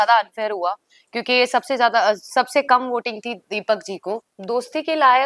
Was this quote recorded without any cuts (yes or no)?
no